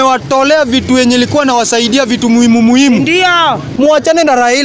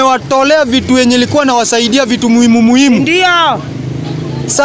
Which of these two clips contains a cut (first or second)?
first